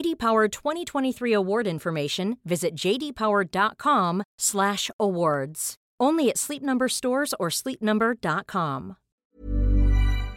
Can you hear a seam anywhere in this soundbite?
yes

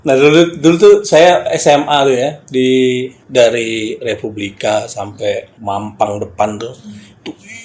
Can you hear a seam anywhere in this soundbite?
yes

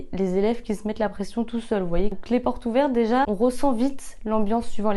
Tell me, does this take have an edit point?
yes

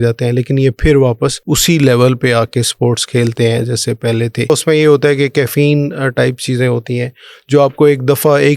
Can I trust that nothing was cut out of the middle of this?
no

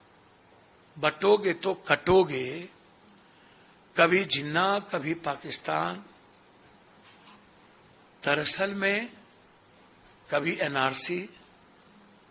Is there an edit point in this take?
no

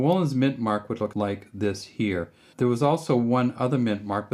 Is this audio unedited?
no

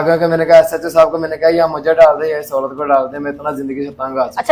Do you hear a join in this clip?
no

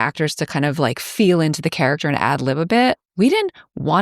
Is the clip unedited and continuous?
no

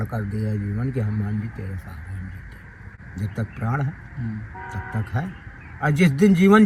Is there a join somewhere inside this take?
no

